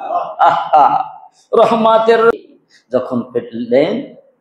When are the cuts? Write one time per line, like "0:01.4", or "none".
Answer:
0:02.3